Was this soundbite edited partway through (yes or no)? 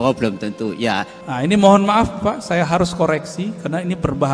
yes